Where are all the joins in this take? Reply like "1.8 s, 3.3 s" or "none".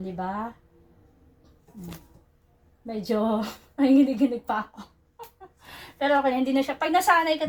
none